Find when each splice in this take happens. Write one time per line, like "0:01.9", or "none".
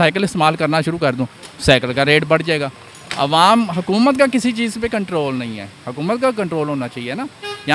none